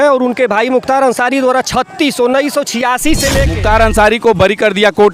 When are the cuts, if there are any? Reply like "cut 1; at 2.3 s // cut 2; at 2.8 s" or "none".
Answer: cut 1; at 3.5 s